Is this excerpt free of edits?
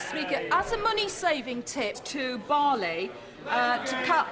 yes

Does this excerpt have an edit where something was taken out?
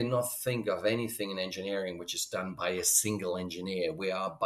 no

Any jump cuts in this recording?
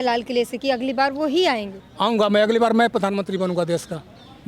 yes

